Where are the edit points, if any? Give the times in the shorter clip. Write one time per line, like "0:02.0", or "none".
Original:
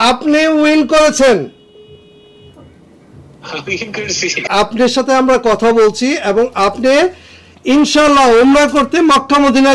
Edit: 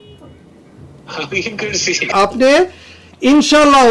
0:02.1